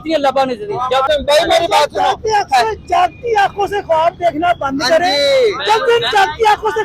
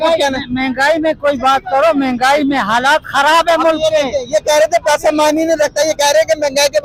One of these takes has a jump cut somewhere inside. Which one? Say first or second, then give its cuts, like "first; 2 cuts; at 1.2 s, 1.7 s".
first; 1 cut; at 1.1 s